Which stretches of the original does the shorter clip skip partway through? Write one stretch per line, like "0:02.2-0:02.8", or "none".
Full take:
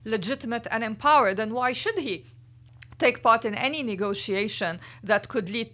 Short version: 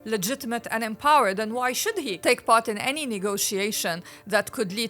0:02.2-0:02.9